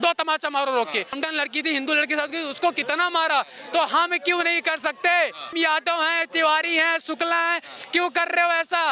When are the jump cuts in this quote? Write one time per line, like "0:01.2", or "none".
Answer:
0:01.2
0:05.5